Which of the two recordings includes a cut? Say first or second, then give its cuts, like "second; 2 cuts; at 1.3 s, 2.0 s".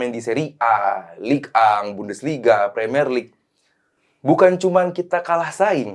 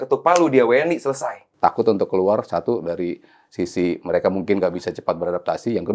second; 1 cut; at 1.4 s